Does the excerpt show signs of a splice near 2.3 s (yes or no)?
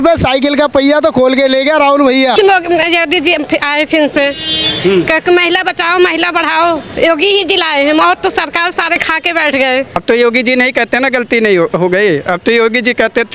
yes